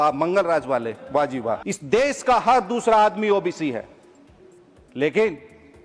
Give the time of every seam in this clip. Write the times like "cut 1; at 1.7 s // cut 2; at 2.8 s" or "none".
cut 1; at 1.6 s